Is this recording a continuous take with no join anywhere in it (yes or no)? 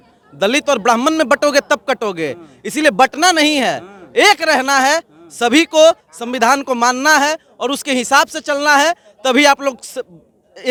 yes